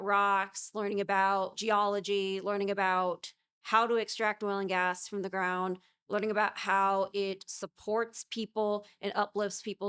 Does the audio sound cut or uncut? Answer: cut